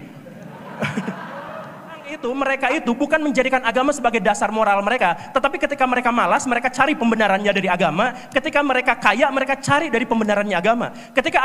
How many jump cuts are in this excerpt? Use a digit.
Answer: 1